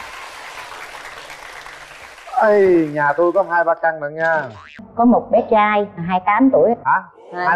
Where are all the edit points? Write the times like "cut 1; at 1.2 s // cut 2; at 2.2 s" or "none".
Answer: cut 1; at 4.8 s